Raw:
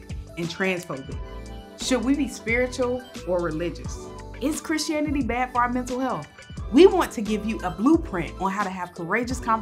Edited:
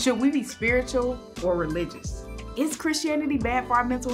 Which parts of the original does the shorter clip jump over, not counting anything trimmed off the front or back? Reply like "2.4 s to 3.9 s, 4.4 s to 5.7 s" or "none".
none